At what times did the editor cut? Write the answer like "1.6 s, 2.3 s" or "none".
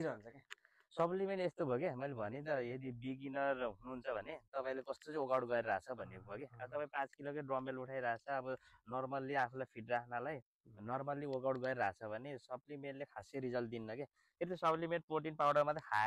none